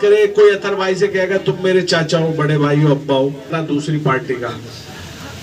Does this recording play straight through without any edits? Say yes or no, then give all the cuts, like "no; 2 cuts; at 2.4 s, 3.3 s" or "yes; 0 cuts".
no; 1 cut; at 3.6 s